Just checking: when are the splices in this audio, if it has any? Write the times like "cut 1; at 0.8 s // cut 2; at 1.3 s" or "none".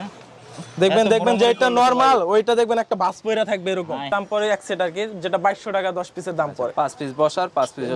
cut 1; at 4.1 s